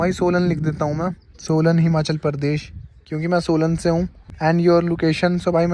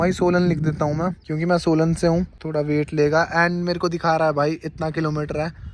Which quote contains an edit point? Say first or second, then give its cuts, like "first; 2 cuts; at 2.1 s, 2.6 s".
second; 2 cuts; at 1.2 s, 2.4 s